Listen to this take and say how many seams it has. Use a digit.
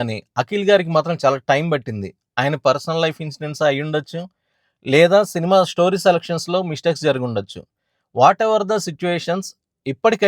0